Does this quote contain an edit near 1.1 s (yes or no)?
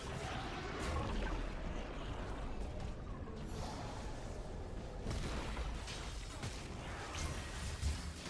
yes